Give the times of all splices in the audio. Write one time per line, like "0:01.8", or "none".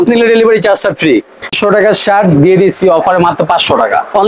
0:01.6

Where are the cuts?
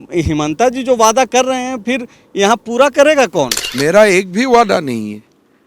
0:03.6

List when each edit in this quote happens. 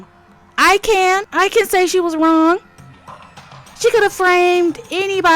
0:01.3

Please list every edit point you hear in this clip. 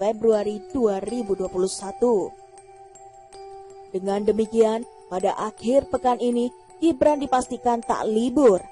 0:02.3
0:03.9

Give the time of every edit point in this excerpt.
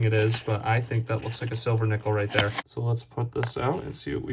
0:02.6

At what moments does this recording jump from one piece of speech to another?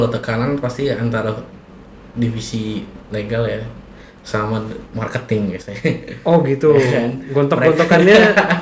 none

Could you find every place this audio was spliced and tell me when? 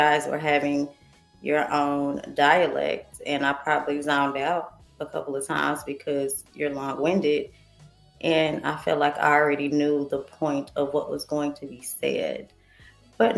none

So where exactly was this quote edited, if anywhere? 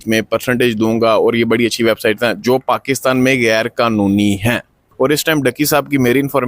0:04.8

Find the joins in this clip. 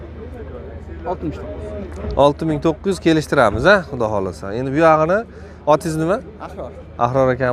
none

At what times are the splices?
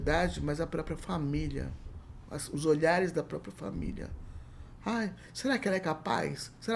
none

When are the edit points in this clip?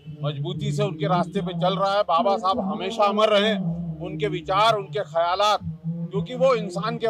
none

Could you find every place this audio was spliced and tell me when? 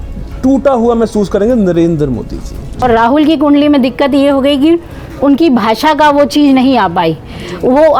0:02.8

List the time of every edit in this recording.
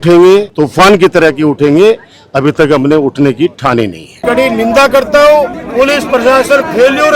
0:04.1
0:05.6

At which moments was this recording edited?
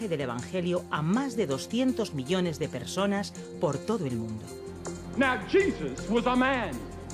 0:05.0

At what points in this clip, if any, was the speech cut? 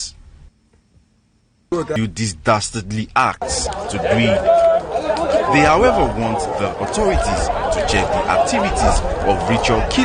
0:02.0

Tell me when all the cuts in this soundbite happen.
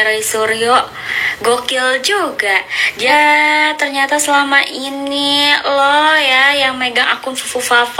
0:03.1

